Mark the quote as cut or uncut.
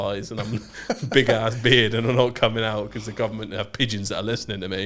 uncut